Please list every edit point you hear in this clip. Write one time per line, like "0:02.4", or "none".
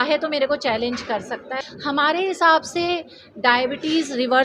0:01.5